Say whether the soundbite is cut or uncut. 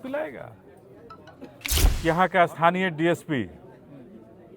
cut